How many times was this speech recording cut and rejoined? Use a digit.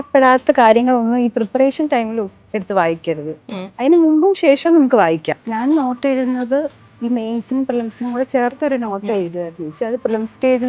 1